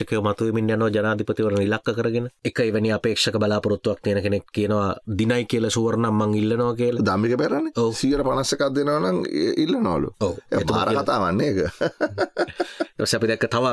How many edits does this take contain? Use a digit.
1